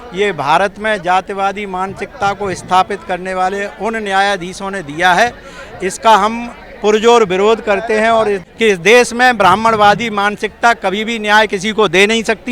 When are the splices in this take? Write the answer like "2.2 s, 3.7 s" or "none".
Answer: 8.4 s